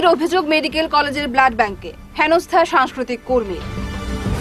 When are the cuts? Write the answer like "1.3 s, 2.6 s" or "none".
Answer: none